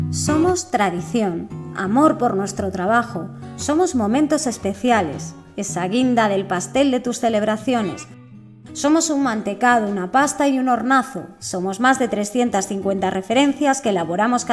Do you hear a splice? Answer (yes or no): no